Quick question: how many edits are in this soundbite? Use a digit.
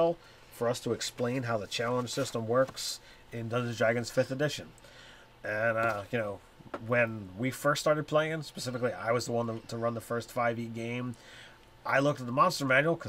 1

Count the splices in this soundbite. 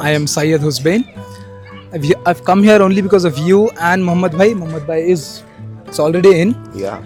0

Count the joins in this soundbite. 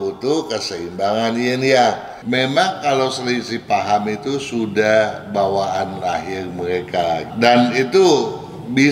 2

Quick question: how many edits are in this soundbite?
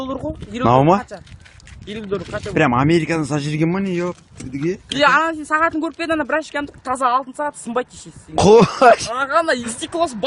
0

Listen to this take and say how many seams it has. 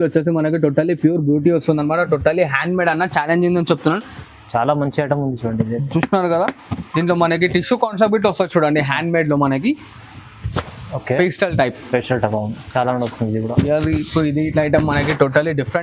1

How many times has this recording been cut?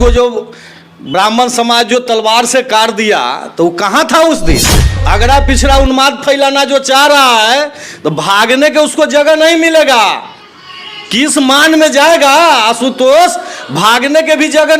1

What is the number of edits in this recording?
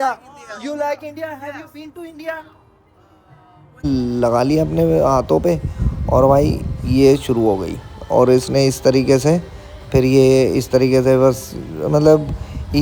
1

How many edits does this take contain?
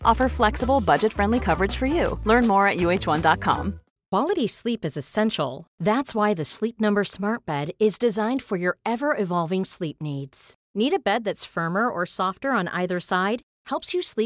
1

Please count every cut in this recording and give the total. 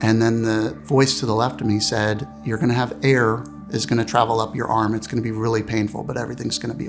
0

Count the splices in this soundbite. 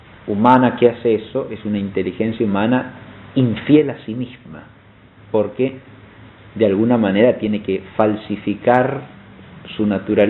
0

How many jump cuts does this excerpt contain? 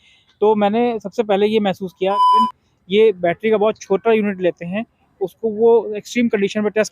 1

